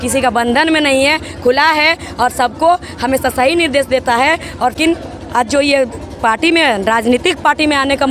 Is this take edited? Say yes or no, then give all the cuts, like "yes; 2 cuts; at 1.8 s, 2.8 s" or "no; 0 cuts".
yes; 1 cut; at 4.8 s